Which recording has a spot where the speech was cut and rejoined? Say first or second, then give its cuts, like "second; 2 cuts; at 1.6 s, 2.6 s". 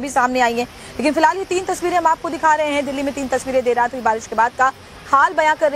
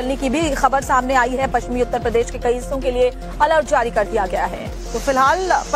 first; 1 cut; at 4.3 s